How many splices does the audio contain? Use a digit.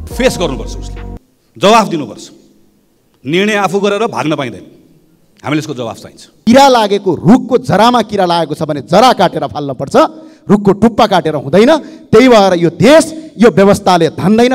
1